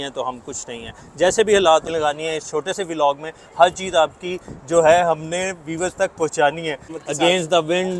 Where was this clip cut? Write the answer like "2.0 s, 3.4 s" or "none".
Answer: 1.9 s, 6.9 s

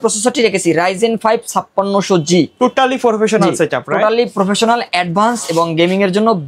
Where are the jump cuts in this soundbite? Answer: none

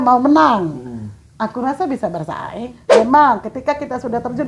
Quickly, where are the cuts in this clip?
2.8 s

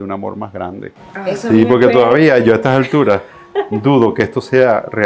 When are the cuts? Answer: 1.3 s

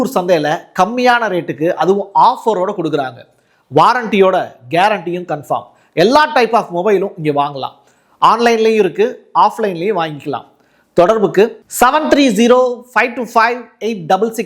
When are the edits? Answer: none

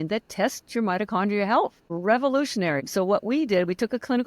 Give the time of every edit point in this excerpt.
1.8 s, 2.9 s

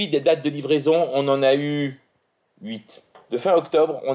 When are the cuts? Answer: none

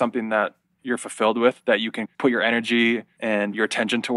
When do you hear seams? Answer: 2.0 s

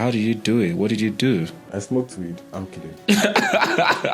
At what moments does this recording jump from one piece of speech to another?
1.6 s, 3.1 s

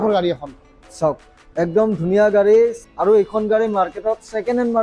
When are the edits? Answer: 2.8 s

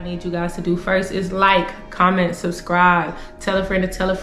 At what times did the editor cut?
none

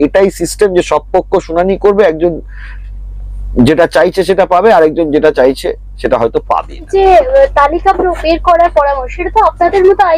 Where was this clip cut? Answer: 6.9 s

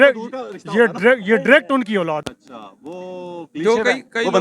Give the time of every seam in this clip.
2.2 s

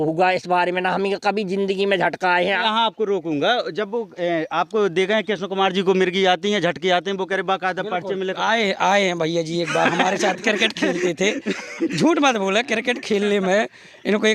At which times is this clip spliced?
2.6 s

